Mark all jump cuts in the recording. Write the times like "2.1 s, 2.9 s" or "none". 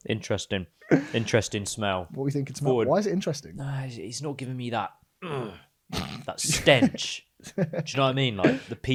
none